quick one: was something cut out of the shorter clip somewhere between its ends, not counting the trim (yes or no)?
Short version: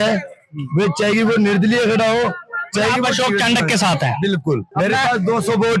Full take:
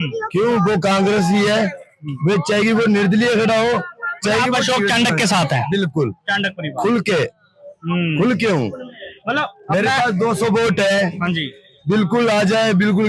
yes